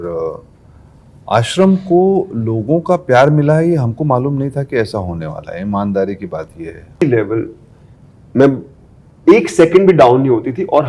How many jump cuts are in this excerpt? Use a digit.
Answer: 1